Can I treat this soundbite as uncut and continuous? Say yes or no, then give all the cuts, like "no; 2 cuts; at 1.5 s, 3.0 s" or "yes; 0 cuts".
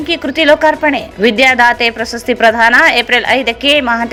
yes; 0 cuts